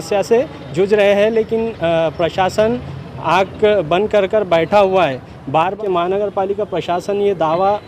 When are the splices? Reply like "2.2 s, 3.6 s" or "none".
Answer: 5.8 s